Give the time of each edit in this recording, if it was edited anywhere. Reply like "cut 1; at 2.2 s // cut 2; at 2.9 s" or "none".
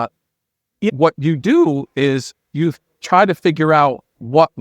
cut 1; at 0.9 s